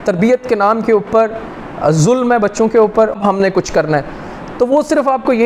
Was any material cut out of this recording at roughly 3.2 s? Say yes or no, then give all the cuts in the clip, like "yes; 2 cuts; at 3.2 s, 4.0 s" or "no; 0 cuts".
yes; 1 cut; at 3.2 s